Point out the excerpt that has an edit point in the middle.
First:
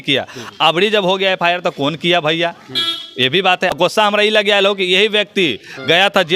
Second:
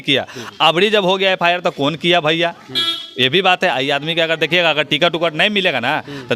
first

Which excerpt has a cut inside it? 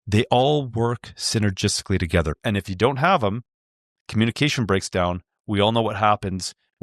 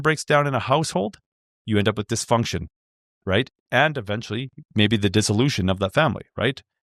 first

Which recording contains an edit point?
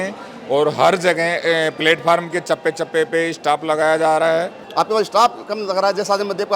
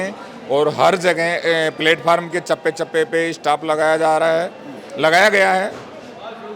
first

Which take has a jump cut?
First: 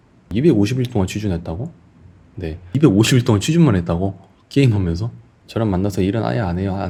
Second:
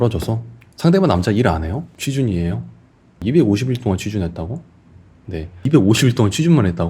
second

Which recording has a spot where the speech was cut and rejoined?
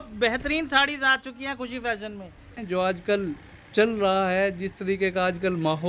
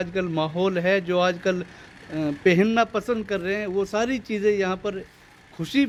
first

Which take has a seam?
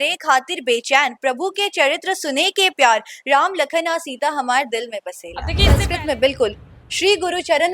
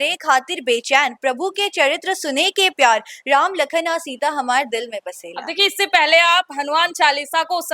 first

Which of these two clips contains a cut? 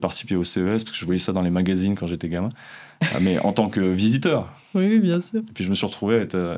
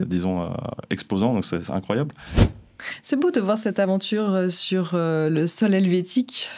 second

